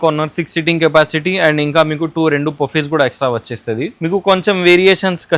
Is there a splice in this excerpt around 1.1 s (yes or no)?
no